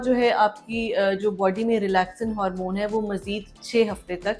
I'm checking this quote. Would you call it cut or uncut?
uncut